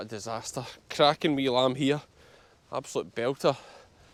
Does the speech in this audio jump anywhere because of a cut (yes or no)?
no